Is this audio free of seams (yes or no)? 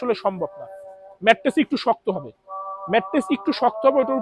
yes